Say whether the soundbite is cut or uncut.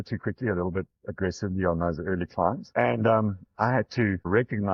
uncut